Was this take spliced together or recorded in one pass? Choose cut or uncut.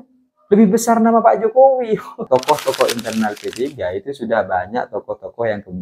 cut